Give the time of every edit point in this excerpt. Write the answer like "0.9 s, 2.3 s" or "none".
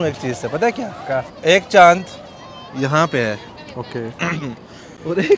1.3 s